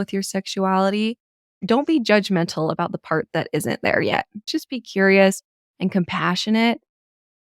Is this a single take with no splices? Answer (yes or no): no